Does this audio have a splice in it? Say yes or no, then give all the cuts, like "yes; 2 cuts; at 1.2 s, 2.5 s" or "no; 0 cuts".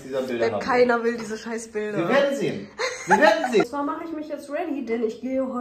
yes; 1 cut; at 3.7 s